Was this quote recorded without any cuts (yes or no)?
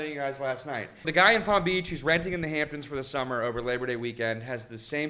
no